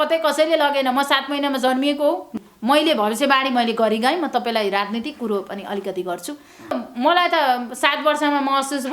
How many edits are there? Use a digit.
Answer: 2